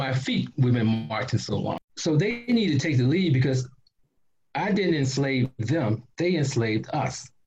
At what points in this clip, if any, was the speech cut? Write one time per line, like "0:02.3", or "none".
0:01.8